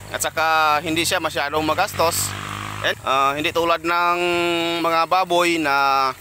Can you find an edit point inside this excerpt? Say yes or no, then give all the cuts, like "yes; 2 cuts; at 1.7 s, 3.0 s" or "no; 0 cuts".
yes; 1 cut; at 3.0 s